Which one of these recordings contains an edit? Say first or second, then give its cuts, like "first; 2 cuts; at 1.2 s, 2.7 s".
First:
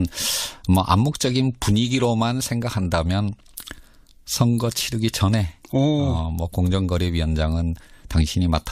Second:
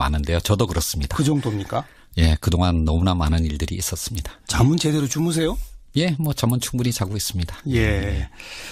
first; 1 cut; at 5.1 s